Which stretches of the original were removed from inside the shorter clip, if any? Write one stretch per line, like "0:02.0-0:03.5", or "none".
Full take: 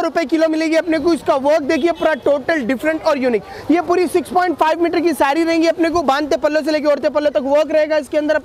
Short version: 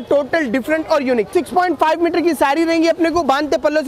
0:03.5-0:04.1